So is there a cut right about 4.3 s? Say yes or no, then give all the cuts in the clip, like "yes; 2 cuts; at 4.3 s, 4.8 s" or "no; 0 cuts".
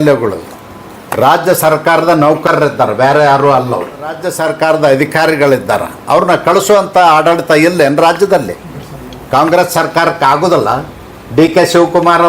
yes; 1 cut; at 4.3 s